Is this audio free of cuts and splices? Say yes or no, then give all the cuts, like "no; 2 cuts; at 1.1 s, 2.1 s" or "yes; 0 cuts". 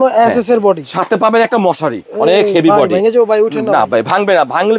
no; 1 cut; at 2.0 s